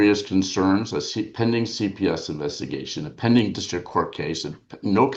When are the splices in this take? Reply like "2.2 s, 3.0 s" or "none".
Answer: none